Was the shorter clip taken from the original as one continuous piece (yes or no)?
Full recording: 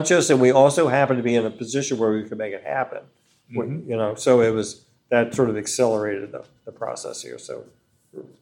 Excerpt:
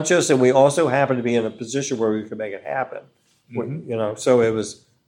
yes